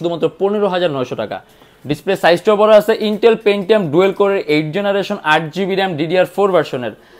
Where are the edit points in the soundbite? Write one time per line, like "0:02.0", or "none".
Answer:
none